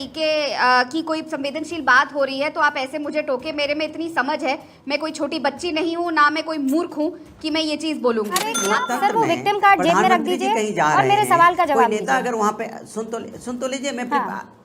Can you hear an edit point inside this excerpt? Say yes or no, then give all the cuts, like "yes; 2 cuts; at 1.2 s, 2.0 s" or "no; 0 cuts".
yes; 1 cut; at 8.5 s